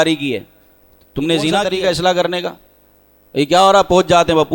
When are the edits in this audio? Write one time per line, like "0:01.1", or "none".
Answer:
0:01.7